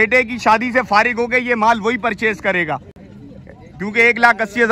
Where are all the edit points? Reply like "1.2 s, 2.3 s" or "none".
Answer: none